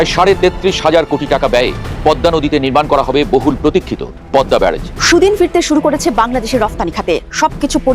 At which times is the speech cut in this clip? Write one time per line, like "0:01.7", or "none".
0:04.9